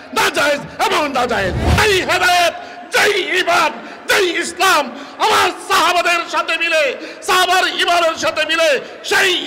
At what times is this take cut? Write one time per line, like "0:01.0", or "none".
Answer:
0:01.6